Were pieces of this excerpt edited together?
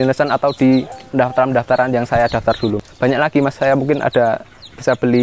yes; 2 cuts; at 1.0 s, 2.9 s

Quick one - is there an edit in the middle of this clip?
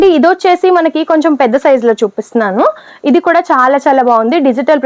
no; 0 cuts

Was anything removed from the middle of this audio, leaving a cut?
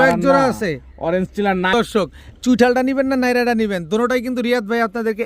yes; 1 cut; at 1.7 s

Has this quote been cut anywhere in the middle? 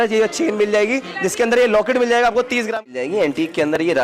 yes; 1 cut; at 2.8 s

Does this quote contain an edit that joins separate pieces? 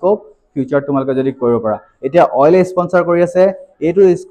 no; 0 cuts

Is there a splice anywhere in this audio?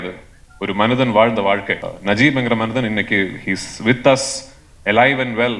yes; 1 cut; at 1.9 s

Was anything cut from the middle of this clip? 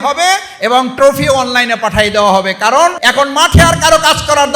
yes; 1 cut; at 3.0 s

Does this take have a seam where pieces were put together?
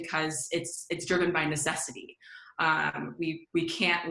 no; 0 cuts

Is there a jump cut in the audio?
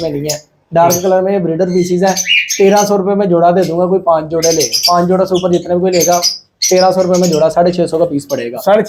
no; 0 cuts

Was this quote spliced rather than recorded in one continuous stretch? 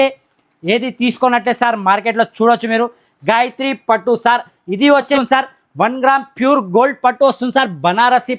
yes; 1 cut; at 5.1 s

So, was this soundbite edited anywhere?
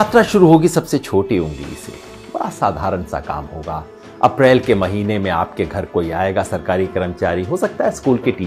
no; 0 cuts

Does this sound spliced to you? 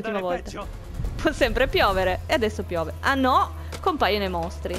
no; 0 cuts

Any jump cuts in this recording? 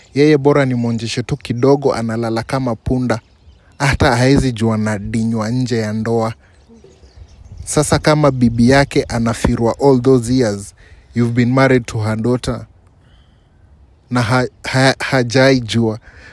no; 0 cuts

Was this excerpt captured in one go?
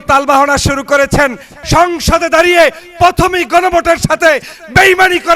no; 1 cut; at 1.5 s

